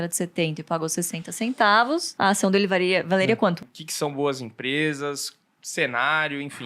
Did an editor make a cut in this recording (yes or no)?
yes